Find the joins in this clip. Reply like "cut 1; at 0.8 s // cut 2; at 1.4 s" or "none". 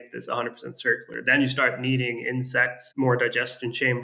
cut 1; at 2.8 s